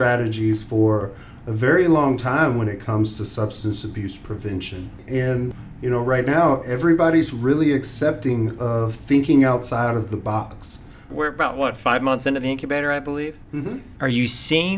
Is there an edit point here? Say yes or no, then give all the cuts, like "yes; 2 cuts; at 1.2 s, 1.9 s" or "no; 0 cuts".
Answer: no; 0 cuts